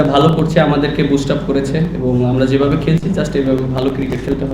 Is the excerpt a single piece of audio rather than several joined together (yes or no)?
yes